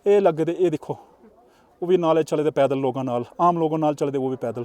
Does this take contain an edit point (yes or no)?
no